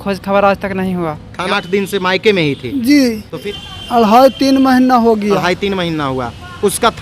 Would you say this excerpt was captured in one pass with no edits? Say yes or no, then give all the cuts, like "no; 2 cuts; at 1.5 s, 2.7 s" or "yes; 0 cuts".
no; 2 cuts; at 1.5 s, 3.4 s